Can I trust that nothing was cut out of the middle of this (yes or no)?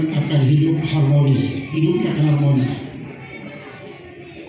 yes